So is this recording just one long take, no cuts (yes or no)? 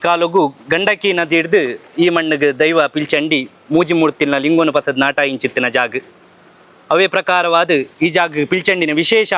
yes